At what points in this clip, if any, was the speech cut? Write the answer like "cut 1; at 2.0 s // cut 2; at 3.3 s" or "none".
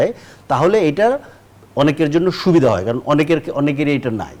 none